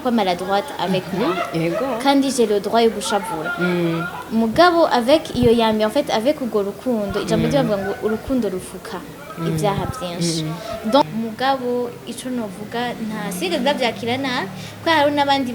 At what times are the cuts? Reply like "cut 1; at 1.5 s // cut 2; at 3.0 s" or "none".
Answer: cut 1; at 11.0 s